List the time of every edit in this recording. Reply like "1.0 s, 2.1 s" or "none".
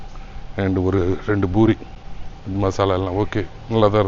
none